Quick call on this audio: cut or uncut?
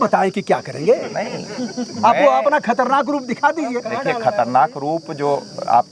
uncut